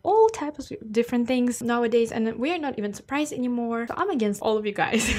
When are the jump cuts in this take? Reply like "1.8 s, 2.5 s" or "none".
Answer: none